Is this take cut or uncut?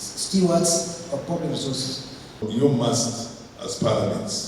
cut